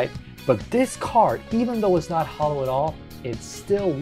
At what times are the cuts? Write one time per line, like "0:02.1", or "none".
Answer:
none